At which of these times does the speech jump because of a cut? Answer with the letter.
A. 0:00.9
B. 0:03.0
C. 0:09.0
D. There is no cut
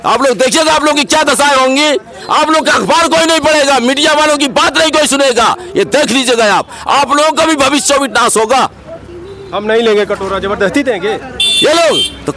D